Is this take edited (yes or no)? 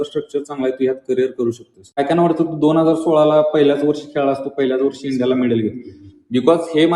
yes